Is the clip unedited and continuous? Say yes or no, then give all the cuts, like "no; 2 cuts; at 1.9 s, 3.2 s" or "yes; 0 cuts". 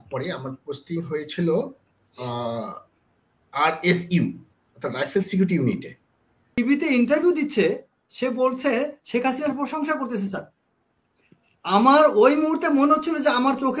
no; 1 cut; at 6.6 s